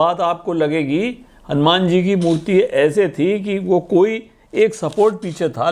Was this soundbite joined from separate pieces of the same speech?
no; 0 cuts

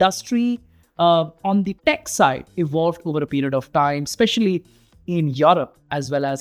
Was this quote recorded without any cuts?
no; 1 cut; at 1.7 s

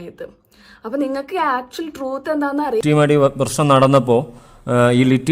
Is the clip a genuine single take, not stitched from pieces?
no; 1 cut; at 2.8 s

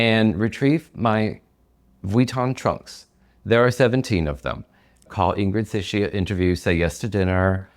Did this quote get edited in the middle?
yes; 1 cut; at 5.1 s

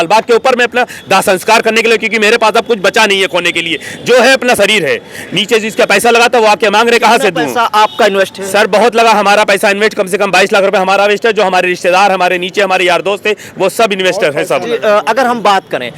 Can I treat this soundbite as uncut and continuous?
yes; 0 cuts

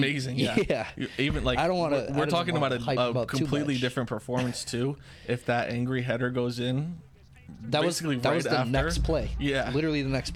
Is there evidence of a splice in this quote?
no; 0 cuts

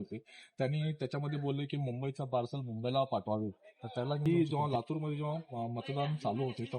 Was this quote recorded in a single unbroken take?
no; 1 cut; at 4.2 s

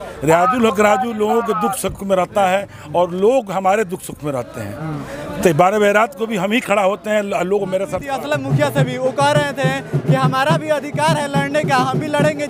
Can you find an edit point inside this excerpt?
yes; 1 cut; at 8.0 s

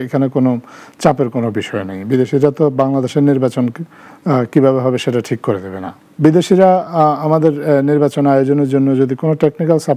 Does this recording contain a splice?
no; 0 cuts

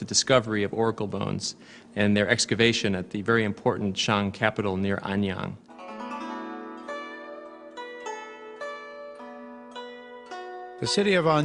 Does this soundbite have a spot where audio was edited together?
yes; 1 cut; at 2.3 s

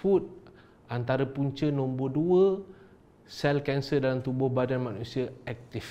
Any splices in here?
no; 0 cuts

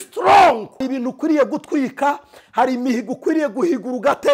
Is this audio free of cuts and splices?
no; 1 cut; at 0.9 s

